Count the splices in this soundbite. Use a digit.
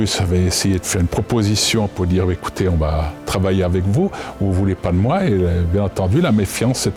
0